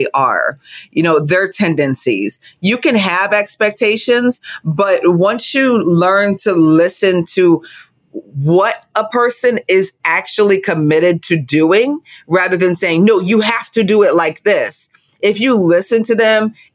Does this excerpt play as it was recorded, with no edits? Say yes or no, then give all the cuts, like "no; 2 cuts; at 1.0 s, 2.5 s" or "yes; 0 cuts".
yes; 0 cuts